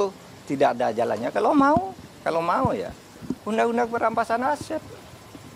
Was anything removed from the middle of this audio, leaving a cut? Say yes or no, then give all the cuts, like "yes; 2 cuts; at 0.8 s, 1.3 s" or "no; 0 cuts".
no; 0 cuts